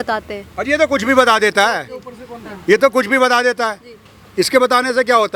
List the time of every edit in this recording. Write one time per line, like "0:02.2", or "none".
none